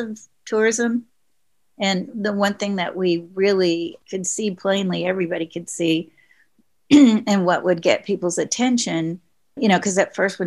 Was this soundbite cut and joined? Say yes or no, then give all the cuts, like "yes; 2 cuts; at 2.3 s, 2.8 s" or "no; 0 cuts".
no; 0 cuts